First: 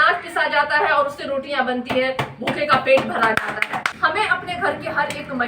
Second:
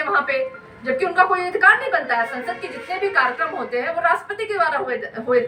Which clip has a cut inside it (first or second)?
first